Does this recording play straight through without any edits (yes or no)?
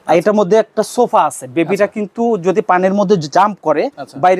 yes